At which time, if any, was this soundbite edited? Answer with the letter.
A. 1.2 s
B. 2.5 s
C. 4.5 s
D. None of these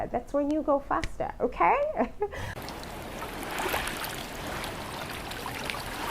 B